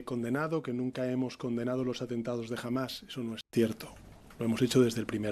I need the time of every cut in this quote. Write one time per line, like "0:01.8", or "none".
none